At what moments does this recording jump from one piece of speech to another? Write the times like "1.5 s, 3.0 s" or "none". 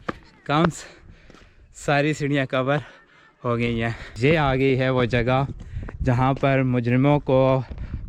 4.1 s